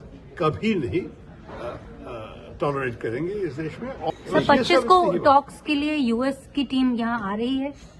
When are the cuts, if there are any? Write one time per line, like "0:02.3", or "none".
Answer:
0:04.1